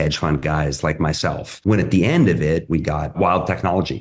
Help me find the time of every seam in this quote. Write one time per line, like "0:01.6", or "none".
0:01.5